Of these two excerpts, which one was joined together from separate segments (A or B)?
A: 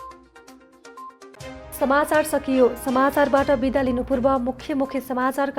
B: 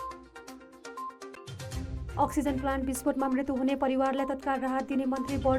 B